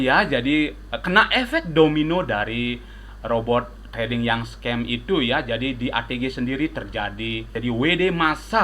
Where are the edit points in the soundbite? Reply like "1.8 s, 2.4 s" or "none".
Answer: 7.5 s